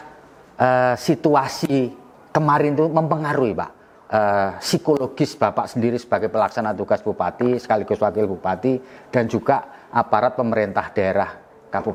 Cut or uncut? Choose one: uncut